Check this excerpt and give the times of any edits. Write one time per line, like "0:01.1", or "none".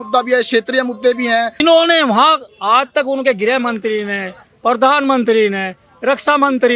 0:01.6